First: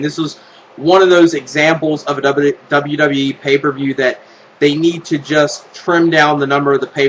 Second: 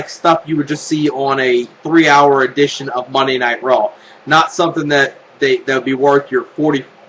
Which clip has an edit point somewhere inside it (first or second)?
second